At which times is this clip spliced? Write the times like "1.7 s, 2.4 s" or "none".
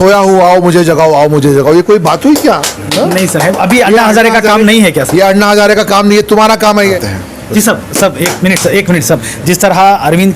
6.9 s